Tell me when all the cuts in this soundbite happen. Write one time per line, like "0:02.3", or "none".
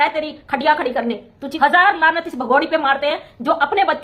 0:01.5